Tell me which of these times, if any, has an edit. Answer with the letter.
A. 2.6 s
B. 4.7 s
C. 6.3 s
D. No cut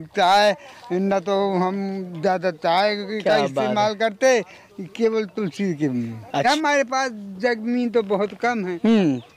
C